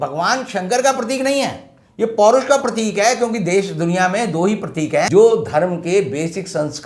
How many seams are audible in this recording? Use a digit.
1